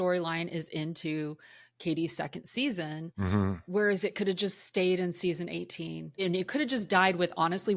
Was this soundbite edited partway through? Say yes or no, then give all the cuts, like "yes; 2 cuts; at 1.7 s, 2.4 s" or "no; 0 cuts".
yes; 2 cuts; at 4.1 s, 6.2 s